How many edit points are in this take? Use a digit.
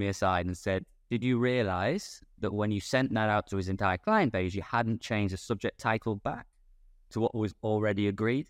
1